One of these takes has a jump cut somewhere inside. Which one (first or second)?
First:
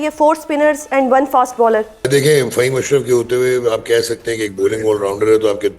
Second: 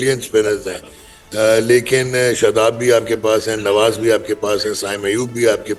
first